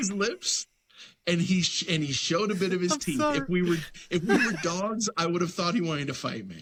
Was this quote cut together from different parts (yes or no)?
no